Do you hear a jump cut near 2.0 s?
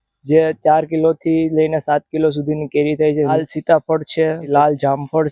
no; 2 cuts; at 3.3 s, 4.4 s

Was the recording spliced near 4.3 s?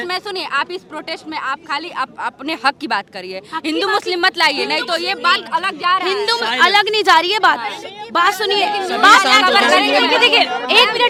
no; 0 cuts

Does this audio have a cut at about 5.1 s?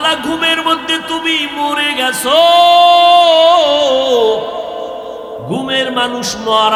no; 0 cuts

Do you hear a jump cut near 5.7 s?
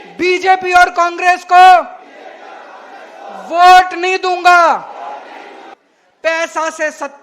yes; 1 cut; at 5.7 s

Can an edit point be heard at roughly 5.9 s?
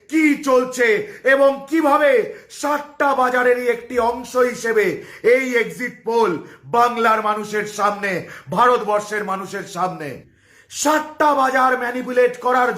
no; 1 cut; at 10.2 s

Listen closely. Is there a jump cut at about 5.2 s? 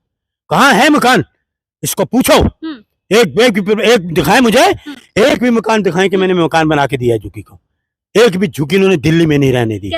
no; 0 cuts

